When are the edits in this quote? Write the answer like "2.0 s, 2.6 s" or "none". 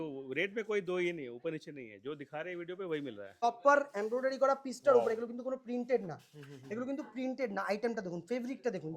3.4 s

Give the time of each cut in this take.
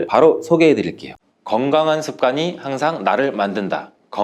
1.0 s

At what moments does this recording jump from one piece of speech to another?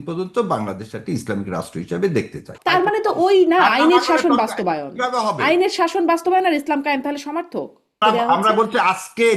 2.5 s, 8.0 s

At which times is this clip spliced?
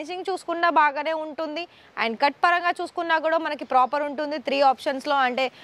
none

